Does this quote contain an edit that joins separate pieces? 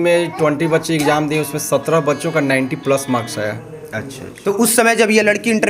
yes; 1 cut; at 4.2 s

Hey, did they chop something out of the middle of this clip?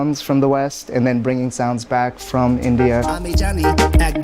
yes; 1 cut; at 3.1 s

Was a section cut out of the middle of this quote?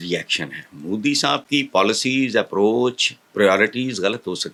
no; 0 cuts

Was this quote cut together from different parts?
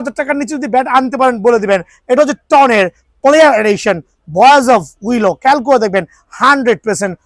no; 0 cuts

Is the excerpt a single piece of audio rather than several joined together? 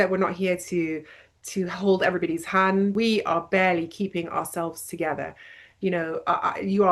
no; 1 cut; at 2.9 s

